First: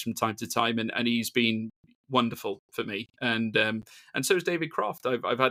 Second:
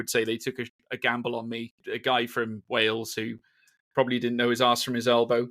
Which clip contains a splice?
second; 1 cut; at 1.8 s

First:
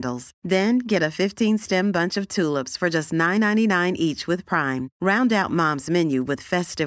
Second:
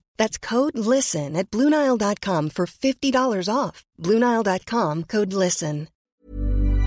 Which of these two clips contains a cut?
second; 1 cut; at 5.9 s

